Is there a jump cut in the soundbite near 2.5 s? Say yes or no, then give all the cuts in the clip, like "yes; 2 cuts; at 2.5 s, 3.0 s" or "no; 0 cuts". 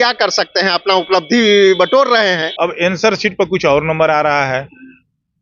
yes; 1 cut; at 2.5 s